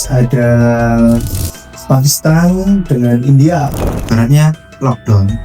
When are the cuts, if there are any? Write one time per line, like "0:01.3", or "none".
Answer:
0:03.8